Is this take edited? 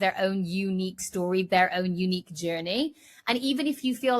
no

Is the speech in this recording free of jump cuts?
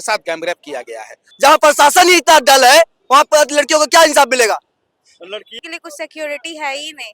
no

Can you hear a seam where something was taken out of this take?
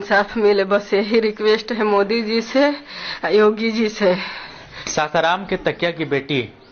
no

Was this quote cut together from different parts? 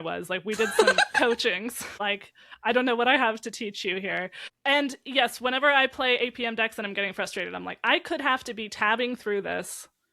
yes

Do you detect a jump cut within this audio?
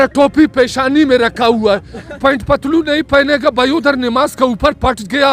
yes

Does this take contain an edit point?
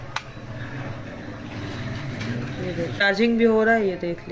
yes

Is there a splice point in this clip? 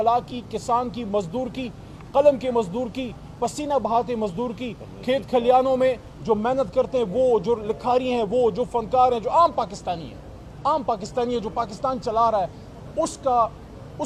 no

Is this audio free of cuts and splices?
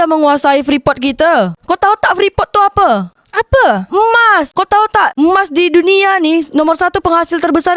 yes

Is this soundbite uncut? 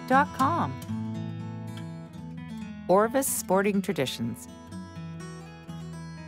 yes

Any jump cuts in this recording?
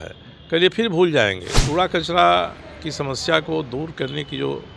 yes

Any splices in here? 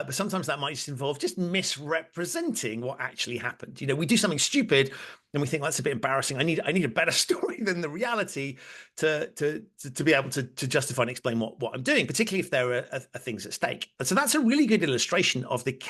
no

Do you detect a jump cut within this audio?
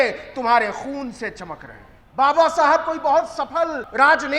yes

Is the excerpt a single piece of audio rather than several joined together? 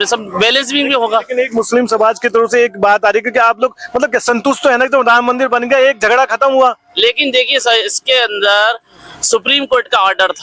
yes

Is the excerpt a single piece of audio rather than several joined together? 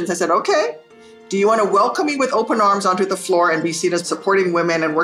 no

